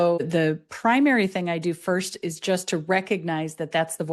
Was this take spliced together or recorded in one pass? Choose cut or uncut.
uncut